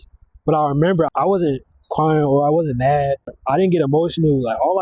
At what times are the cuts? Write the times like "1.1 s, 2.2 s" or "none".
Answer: 1.1 s, 3.4 s